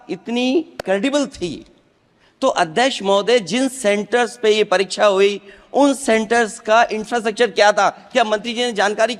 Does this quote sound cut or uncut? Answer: uncut